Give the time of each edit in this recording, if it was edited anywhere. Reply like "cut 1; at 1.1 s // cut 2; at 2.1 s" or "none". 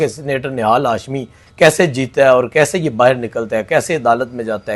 none